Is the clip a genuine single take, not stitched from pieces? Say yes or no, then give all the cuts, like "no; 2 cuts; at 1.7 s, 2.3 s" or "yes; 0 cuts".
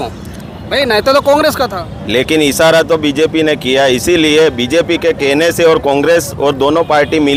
yes; 0 cuts